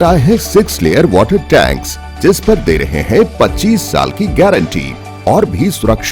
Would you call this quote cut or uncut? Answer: uncut